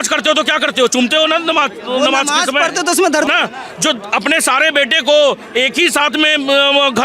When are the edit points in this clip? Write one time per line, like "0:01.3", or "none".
0:03.2